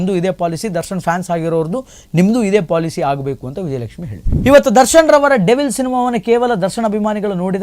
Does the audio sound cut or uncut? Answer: cut